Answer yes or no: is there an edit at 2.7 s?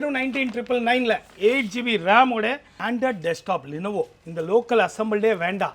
yes